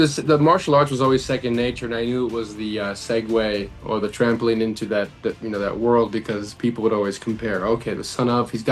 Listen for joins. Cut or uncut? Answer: uncut